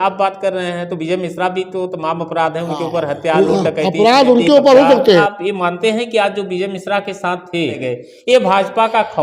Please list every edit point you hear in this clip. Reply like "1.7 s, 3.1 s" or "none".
5.2 s, 7.8 s

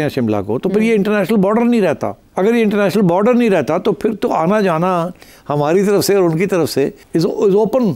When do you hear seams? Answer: 2.2 s, 7.0 s

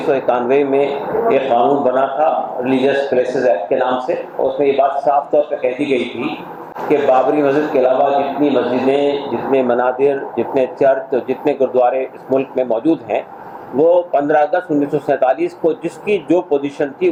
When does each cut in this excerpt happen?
none

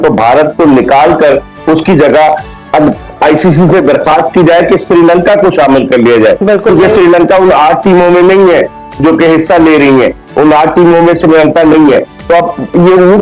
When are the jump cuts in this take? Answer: none

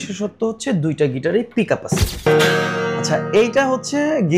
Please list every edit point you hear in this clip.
2.3 s

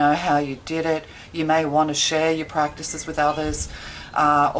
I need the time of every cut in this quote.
none

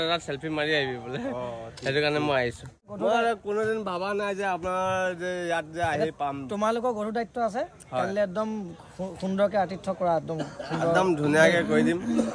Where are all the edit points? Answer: none

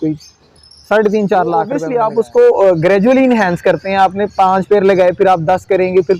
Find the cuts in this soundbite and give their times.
1.8 s

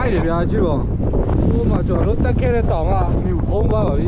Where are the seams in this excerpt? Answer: 1.3 s

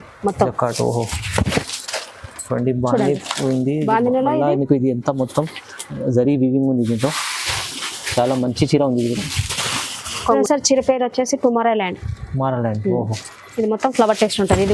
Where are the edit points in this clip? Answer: 10.4 s

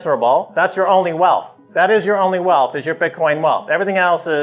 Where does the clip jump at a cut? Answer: 1.6 s

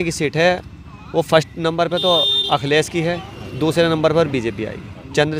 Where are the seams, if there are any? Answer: none

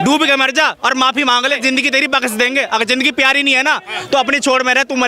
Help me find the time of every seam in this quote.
1.1 s

